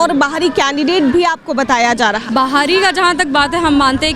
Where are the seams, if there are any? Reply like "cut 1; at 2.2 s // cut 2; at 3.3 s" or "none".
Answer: cut 1; at 2.3 s